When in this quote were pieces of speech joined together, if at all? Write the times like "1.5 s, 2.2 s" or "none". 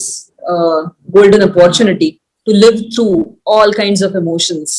none